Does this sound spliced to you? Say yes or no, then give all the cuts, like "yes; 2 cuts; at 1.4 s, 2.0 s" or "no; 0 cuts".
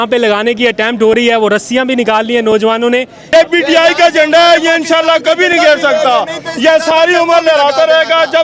yes; 1 cut; at 3.2 s